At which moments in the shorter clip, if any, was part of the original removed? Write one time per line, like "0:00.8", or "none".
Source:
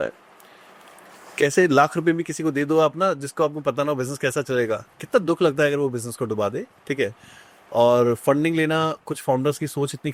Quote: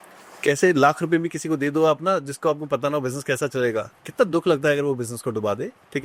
none